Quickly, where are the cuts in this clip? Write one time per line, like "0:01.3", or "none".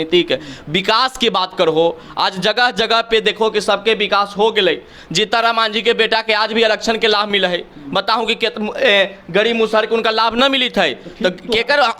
none